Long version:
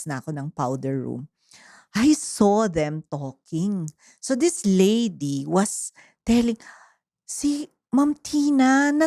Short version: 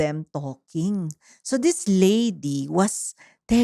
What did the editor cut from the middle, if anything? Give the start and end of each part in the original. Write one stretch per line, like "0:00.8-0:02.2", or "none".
none